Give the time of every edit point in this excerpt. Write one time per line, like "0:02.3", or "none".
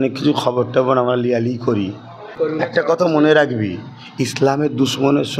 0:02.3